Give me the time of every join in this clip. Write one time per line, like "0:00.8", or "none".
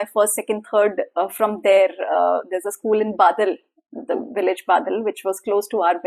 none